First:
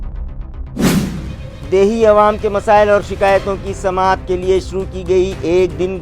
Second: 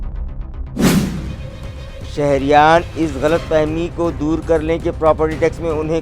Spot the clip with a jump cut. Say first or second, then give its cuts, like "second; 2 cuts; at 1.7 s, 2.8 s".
second; 1 cut; at 1.4 s